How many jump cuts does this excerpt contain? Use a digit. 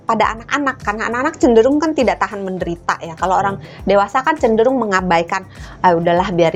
0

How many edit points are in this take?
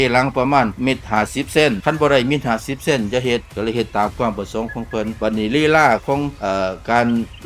2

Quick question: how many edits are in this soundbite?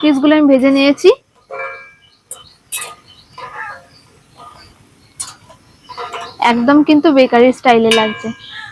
0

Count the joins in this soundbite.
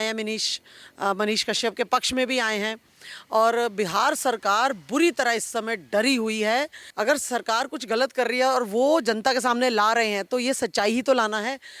1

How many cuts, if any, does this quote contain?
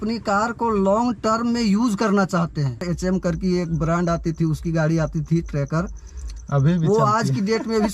1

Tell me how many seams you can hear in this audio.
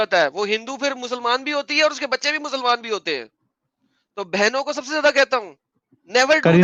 0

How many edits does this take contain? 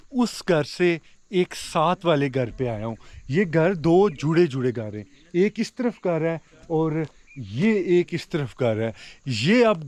0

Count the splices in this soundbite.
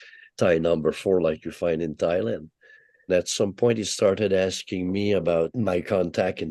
2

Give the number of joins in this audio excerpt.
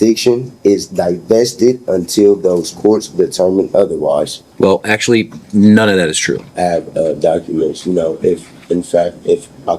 2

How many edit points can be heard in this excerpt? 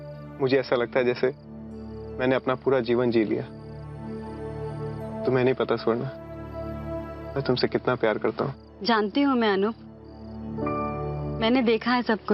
1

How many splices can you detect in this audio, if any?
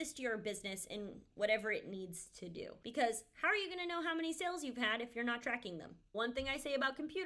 2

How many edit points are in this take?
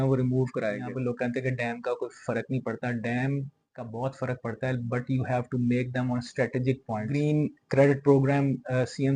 2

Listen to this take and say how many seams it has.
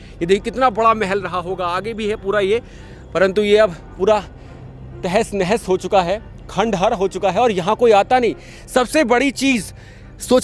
0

